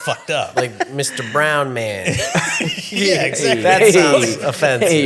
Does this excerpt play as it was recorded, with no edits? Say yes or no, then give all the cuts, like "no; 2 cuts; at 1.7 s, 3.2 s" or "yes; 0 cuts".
yes; 0 cuts